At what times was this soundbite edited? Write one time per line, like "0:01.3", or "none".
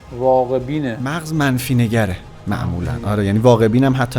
0:01.1